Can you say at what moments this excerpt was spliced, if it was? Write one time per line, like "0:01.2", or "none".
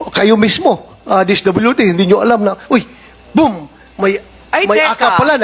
none